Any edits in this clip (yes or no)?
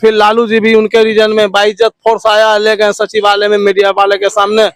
no